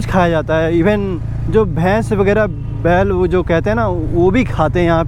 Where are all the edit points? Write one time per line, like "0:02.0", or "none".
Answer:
none